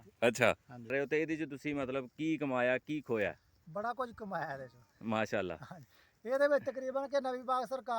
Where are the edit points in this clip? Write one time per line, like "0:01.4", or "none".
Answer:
0:00.9